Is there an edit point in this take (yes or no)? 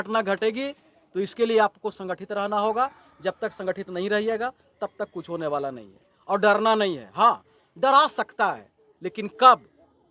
no